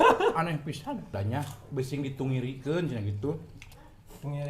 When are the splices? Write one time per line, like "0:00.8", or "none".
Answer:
0:01.1